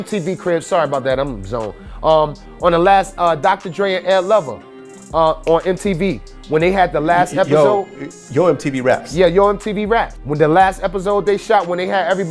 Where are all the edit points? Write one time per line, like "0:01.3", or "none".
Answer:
0:10.2